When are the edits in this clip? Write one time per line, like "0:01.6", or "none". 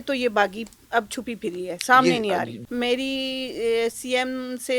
0:02.5